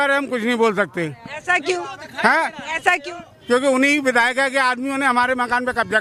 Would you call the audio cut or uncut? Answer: uncut